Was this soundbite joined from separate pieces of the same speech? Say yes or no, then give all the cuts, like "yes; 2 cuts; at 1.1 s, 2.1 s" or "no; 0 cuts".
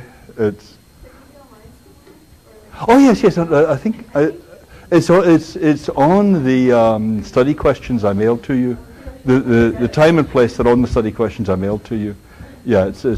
no; 0 cuts